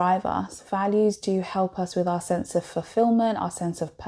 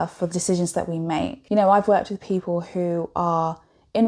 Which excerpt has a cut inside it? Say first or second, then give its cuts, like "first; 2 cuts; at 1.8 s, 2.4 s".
second; 1 cut; at 1.4 s